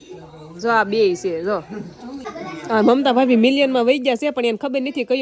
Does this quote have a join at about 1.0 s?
no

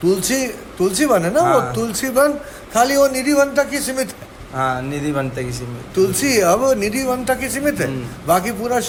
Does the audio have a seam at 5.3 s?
no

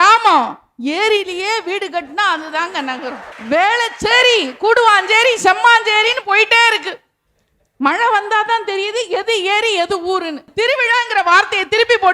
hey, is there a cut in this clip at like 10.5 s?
yes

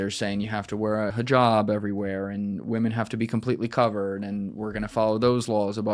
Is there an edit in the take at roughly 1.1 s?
yes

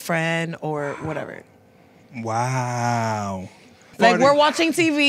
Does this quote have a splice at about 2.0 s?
no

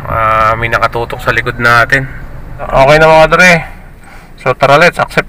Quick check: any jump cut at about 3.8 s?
no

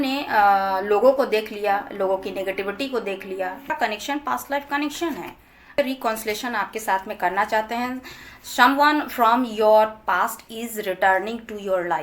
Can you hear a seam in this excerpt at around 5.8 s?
yes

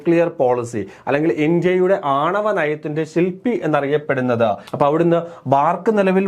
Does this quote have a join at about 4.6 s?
yes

